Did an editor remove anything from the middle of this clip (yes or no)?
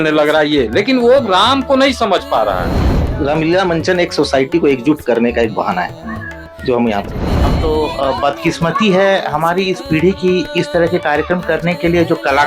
yes